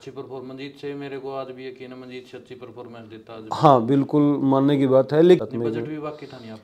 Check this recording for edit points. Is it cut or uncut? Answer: cut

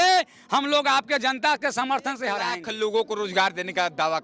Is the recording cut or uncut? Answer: cut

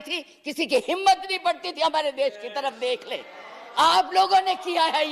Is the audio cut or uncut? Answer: uncut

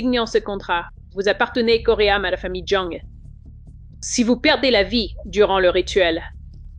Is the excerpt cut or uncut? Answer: uncut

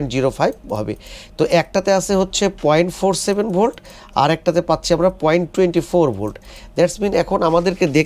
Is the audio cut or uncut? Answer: uncut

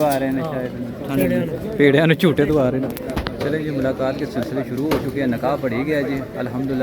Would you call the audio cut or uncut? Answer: uncut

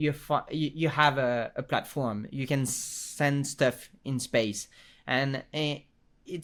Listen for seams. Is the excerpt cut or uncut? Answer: uncut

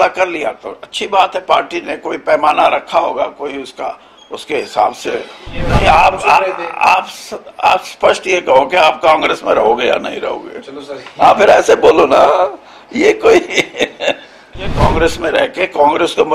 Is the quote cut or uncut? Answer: cut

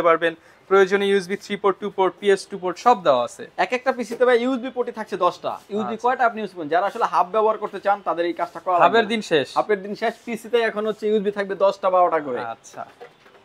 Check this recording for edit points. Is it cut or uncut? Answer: uncut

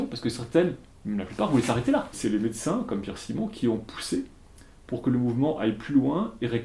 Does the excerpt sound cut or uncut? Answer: cut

